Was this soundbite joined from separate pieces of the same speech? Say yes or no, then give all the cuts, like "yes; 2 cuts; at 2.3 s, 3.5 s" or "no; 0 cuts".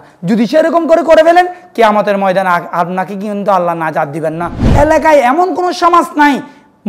yes; 1 cut; at 4.6 s